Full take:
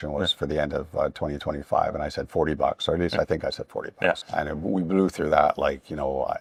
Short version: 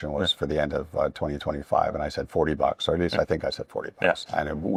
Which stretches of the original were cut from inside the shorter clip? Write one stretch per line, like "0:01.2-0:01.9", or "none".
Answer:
none